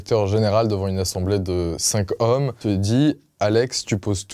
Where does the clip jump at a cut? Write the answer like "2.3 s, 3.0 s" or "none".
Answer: 2.6 s